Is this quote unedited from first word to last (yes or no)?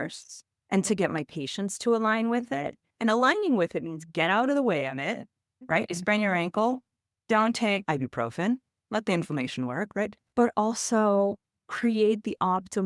no